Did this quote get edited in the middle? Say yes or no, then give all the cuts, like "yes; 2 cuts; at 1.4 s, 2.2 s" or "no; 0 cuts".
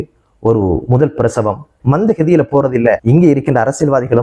yes; 2 cuts; at 1.7 s, 3.0 s